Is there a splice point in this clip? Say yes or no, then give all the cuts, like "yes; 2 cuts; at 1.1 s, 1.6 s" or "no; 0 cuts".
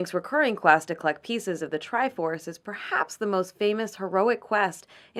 no; 0 cuts